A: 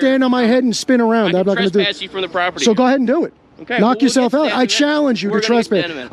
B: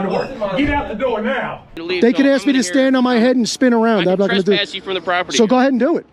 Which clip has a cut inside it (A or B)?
B